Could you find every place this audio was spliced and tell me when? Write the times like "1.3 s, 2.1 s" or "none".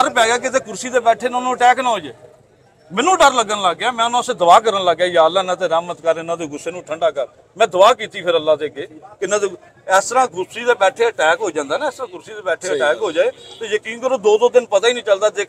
none